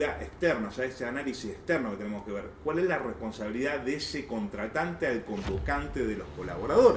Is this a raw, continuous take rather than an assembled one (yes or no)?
yes